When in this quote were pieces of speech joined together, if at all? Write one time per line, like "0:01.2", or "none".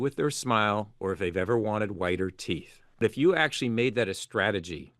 0:03.0